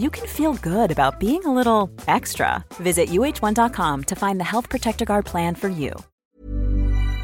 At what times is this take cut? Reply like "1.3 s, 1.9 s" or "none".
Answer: 6.1 s